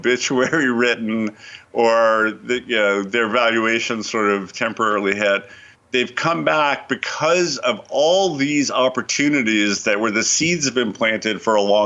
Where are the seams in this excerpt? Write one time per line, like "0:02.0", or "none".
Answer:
none